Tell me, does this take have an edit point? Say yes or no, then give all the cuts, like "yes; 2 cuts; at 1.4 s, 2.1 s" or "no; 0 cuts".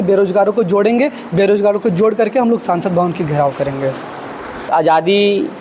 yes; 1 cut; at 4.7 s